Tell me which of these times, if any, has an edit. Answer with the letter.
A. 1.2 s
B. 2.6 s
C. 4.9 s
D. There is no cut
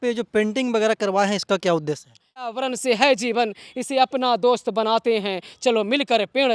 B